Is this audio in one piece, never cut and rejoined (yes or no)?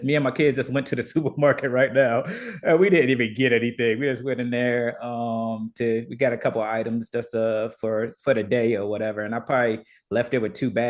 yes